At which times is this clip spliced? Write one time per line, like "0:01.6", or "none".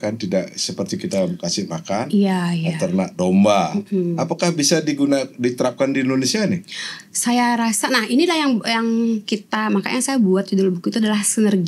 none